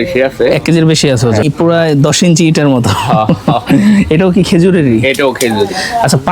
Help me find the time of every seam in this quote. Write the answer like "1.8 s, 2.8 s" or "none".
1.4 s